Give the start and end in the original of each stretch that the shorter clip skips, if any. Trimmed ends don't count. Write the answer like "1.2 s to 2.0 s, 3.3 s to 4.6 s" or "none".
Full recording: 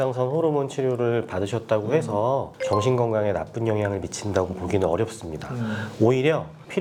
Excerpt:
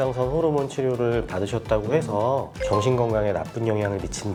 none